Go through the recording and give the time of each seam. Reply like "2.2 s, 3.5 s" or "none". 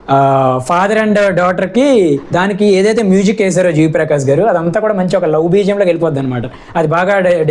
2.3 s